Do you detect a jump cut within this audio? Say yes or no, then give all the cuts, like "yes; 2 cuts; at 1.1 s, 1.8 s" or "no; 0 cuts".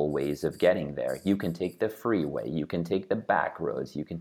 no; 0 cuts